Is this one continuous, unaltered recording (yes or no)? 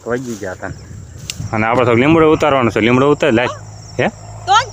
no